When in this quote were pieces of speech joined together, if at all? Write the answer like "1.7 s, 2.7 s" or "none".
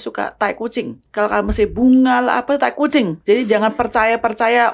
1.0 s